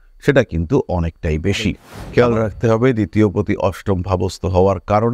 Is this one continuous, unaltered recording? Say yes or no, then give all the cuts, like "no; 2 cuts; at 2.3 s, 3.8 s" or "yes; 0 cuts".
no; 1 cut; at 1.9 s